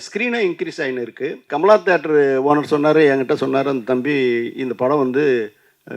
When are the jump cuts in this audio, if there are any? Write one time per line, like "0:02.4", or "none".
0:01.4

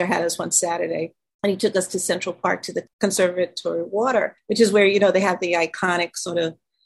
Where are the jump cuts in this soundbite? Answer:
0:01.2
0:02.9
0:04.4

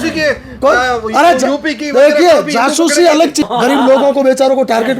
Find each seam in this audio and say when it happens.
0:03.5

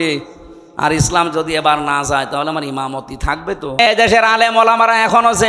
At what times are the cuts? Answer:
0:03.8

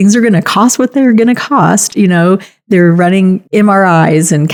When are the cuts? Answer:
none

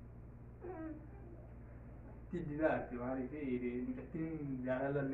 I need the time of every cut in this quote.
0:01.9

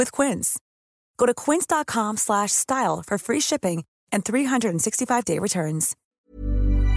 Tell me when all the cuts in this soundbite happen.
0:06.0

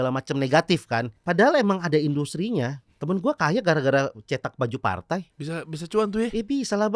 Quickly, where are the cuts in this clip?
0:01.1
0:02.9
0:05.4

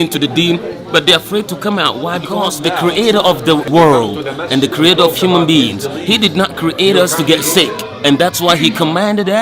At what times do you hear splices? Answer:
0:02.5
0:03.7

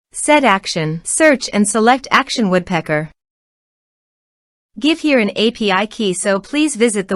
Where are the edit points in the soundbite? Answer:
0:01.0

